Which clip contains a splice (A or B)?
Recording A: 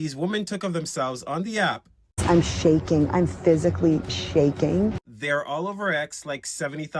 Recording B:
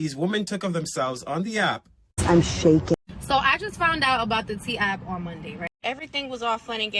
B